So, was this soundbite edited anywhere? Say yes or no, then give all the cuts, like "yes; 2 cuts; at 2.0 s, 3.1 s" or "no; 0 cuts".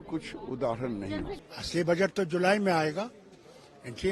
yes; 1 cut; at 1.4 s